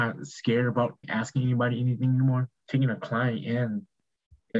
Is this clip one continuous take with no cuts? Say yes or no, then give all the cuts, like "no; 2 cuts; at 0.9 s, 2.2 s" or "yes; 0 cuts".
no; 2 cuts; at 1.0 s, 2.5 s